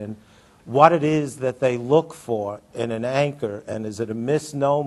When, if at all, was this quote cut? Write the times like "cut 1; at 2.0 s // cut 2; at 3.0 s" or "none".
cut 1; at 3.7 s